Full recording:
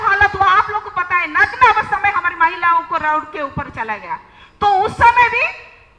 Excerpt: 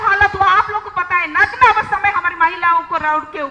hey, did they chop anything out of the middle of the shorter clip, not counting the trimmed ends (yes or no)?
no